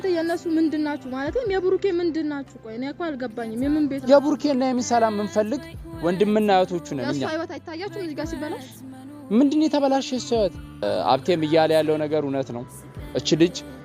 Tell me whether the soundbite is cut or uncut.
cut